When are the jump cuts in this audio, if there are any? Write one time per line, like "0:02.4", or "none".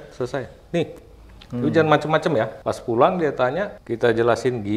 0:02.6
0:03.8